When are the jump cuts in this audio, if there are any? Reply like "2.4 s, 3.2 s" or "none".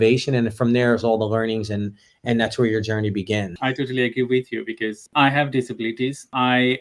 3.5 s, 5.0 s